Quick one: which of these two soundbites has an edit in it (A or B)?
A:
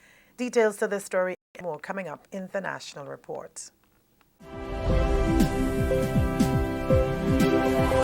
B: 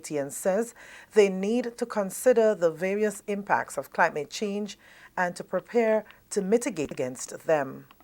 B